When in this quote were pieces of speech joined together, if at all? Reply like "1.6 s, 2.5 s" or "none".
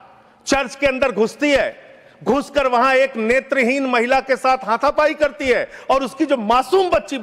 none